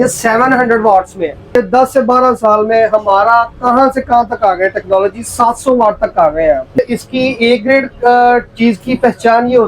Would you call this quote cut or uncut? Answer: cut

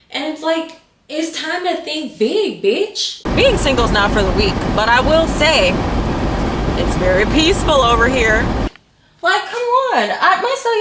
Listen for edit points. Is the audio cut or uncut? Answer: cut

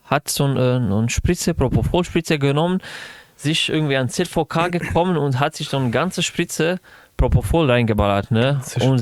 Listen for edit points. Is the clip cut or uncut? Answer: uncut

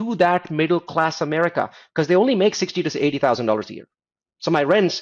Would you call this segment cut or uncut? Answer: uncut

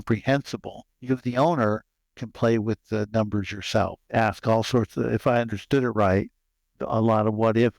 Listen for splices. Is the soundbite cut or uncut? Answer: cut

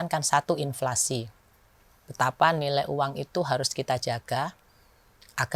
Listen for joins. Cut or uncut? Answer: uncut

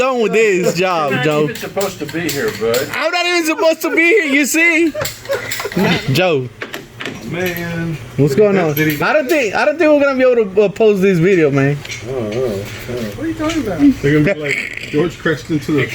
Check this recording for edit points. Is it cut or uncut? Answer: cut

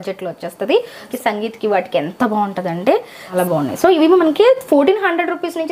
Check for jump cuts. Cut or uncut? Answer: cut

